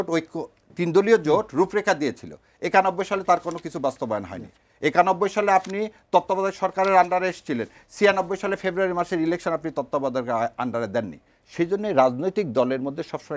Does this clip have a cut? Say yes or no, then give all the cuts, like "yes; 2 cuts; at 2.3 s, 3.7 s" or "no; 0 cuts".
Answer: no; 0 cuts